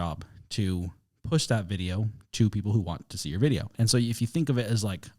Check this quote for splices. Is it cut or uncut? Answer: cut